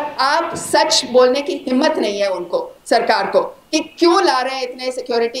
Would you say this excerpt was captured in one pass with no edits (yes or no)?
yes